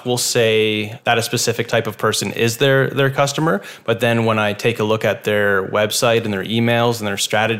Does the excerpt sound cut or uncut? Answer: cut